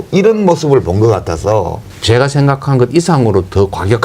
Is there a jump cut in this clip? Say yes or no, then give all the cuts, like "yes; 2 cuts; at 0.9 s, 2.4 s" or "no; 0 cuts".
yes; 1 cut; at 1.9 s